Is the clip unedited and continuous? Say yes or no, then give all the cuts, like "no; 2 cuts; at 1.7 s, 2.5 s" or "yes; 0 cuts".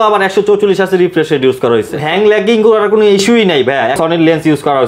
no; 2 cuts; at 2.0 s, 4.0 s